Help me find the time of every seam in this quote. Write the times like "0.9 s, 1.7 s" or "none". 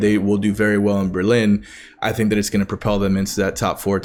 none